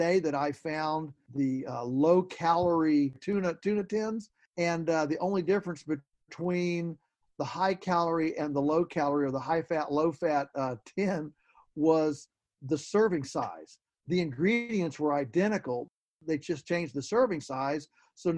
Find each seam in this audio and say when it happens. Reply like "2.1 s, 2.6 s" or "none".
4.4 s, 15.9 s